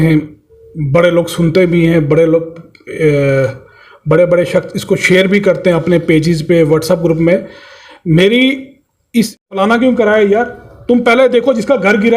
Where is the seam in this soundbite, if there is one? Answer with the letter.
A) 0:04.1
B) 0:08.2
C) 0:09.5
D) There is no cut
C